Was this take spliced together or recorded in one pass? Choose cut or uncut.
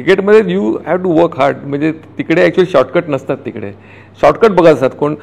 uncut